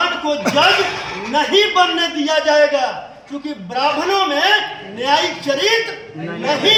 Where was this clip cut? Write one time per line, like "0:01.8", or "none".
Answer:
none